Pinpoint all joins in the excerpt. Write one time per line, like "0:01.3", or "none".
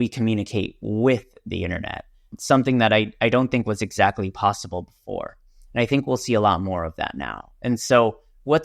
0:02.4